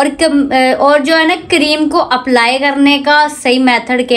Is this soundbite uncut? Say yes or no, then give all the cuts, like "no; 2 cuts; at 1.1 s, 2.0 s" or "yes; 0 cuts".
yes; 0 cuts